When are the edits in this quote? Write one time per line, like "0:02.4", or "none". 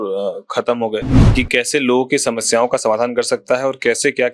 0:01.2